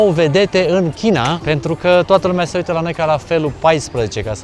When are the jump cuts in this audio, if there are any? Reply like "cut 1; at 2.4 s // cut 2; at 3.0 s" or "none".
cut 1; at 1.4 s